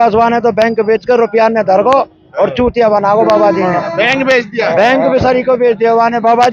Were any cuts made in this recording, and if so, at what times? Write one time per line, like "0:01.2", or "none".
none